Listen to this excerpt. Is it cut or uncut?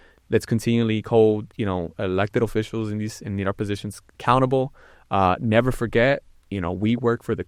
uncut